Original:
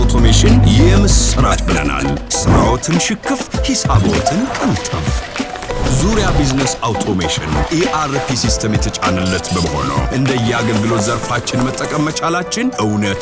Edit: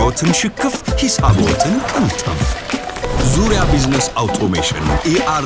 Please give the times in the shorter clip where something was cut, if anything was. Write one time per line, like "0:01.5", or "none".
none